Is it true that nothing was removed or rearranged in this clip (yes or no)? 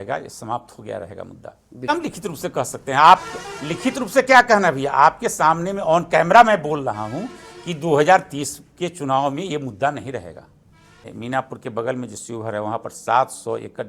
no